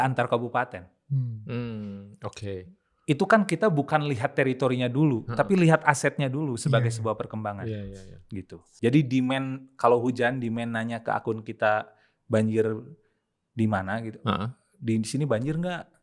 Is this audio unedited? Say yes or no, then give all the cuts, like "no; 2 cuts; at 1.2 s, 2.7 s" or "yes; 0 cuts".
no; 1 cut; at 8.6 s